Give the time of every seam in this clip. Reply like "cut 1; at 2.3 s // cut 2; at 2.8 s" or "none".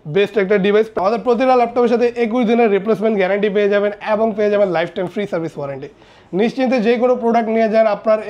cut 1; at 0.9 s